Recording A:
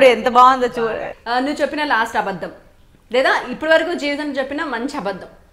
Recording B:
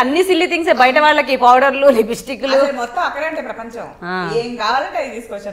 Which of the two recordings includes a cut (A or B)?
A